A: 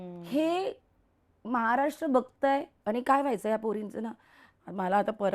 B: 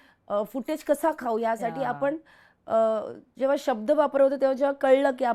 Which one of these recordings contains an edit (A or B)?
A